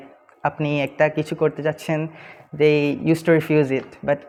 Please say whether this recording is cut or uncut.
uncut